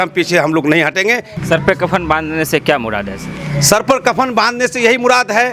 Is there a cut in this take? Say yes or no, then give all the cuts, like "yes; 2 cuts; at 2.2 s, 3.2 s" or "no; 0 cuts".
yes; 1 cut; at 1.3 s